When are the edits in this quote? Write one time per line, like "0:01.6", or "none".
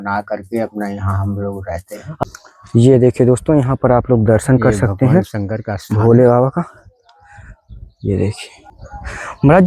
0:02.2